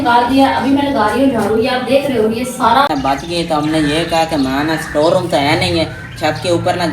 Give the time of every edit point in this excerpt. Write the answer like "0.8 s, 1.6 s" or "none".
2.9 s